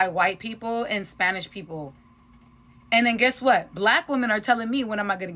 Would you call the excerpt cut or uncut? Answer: uncut